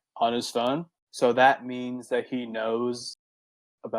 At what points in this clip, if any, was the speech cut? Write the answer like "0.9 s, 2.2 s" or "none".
1.0 s